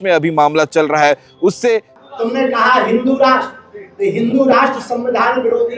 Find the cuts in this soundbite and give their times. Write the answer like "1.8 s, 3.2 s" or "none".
1.9 s